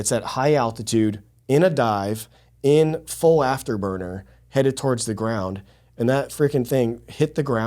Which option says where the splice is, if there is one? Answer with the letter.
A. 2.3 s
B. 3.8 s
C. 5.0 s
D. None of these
D